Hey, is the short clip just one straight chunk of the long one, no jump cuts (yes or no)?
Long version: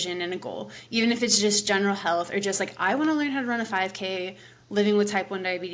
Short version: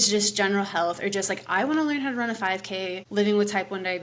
no